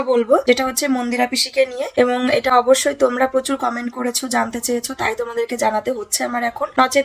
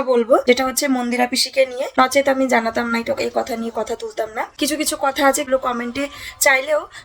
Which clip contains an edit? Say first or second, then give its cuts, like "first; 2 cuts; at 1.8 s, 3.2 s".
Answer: second; 3 cuts; at 1.9 s, 4.4 s, 5.5 s